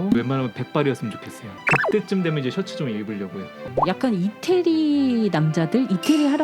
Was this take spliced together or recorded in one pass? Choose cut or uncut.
cut